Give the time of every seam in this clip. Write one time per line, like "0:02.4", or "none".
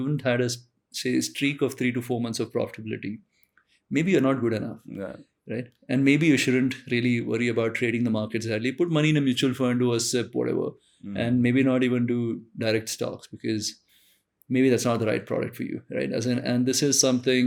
none